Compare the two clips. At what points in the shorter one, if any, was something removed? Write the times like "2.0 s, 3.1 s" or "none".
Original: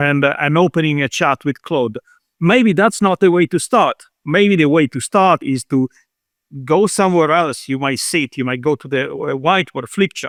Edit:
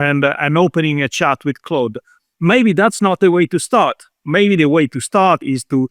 none